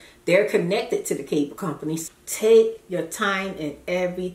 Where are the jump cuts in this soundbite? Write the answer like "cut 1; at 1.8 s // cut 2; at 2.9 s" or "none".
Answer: cut 1; at 2.0 s